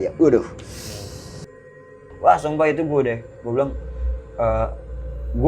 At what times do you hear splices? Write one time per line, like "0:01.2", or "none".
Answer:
0:01.9